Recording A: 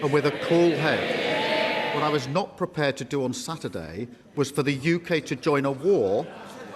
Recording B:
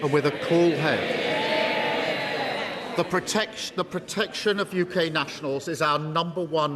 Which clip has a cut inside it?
A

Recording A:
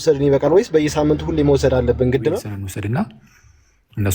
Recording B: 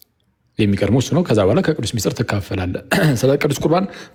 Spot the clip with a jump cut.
A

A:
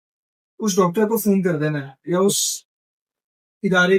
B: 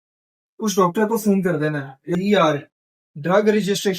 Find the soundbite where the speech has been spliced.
B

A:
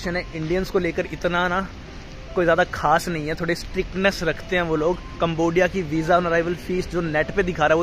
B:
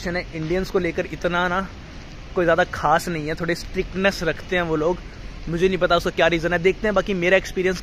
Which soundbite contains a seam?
A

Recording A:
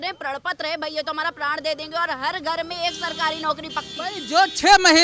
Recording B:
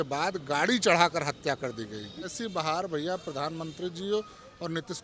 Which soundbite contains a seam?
B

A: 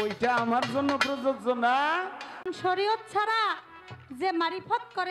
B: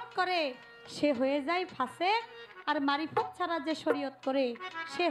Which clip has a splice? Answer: A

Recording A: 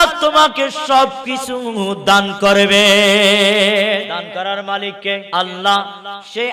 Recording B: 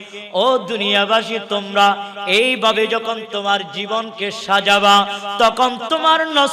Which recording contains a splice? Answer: A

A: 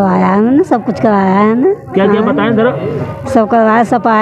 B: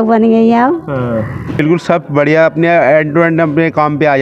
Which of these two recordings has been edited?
B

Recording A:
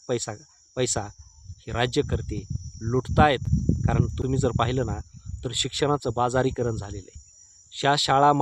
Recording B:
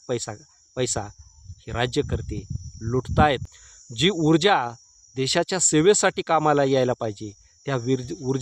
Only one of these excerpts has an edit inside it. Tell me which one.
B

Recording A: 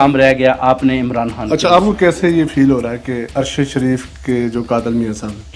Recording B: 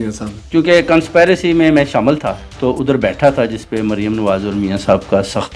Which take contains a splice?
A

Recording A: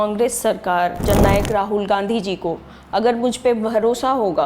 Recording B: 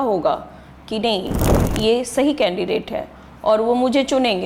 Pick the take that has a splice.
A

